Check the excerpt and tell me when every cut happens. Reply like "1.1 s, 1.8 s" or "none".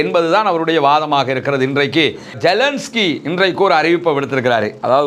2.3 s